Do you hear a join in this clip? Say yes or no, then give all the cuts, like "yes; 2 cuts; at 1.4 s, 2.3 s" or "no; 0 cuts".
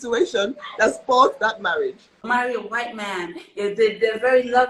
yes; 1 cut; at 2.2 s